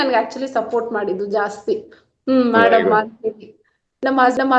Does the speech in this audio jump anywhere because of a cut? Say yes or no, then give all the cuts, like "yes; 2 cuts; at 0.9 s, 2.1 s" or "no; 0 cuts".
no; 0 cuts